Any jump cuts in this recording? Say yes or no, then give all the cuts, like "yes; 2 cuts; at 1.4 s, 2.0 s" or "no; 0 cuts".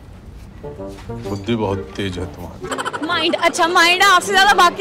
no; 0 cuts